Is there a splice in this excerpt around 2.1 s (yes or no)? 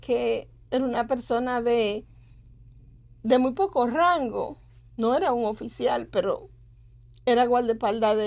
no